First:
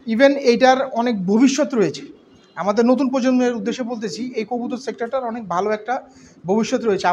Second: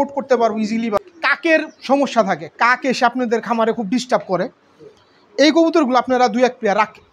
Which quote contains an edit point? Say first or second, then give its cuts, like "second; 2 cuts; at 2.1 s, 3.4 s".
second; 1 cut; at 1.0 s